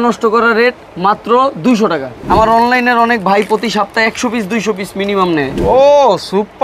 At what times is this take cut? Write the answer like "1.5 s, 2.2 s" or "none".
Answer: 2.1 s, 5.5 s